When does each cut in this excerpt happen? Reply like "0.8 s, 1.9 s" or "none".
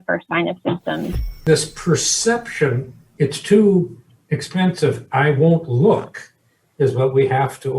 1.4 s